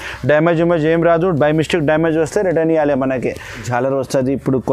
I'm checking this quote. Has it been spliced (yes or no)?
yes